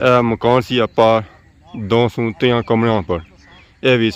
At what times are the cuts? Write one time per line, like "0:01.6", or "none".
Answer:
none

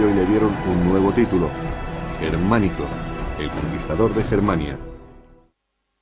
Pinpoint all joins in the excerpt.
none

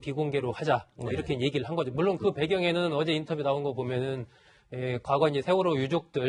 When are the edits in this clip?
none

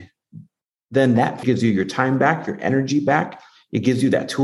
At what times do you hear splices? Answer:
0:01.4

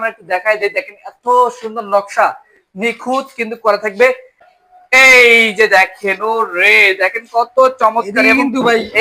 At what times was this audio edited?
none

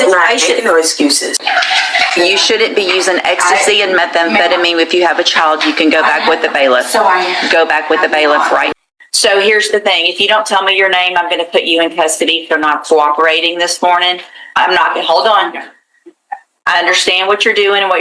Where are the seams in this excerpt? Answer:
0:01.4
0:08.7

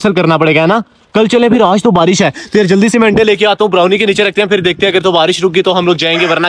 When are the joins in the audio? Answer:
none

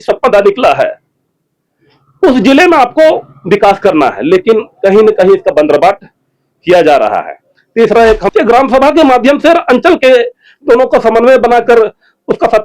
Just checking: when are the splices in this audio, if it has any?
0:08.2

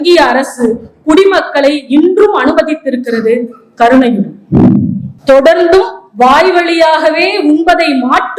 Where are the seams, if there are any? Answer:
0:05.1

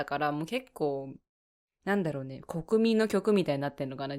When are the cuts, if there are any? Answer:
none

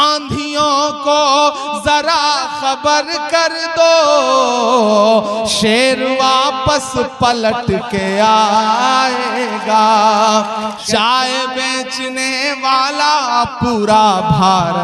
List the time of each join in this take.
0:10.8

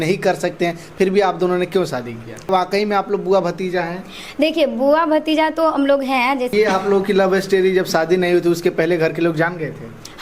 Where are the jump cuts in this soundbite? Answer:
0:02.5
0:06.5

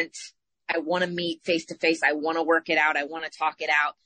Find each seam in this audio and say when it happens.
none

